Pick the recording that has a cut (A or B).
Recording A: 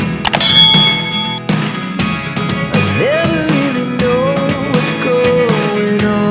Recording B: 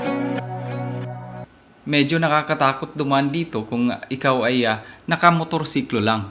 B